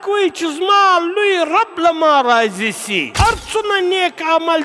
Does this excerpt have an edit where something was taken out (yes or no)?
yes